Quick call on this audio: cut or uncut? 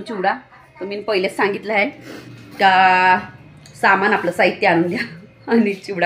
uncut